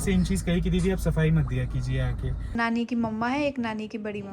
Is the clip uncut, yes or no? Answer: no